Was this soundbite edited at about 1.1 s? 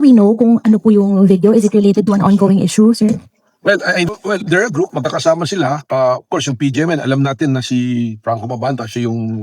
no; 1 cut; at 4.1 s

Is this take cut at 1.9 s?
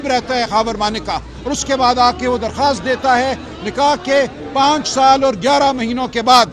no; 0 cuts

